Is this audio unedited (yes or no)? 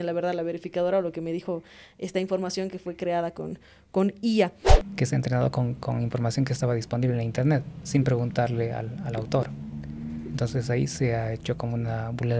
no